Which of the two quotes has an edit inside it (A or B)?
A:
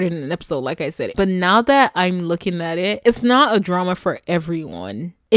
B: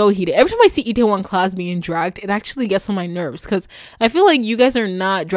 A